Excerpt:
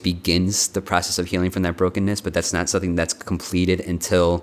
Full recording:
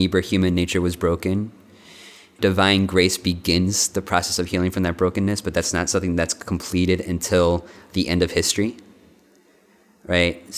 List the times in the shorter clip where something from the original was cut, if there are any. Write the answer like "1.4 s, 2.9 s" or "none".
none